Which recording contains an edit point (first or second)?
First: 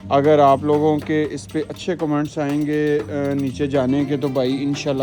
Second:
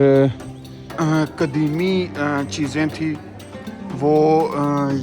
second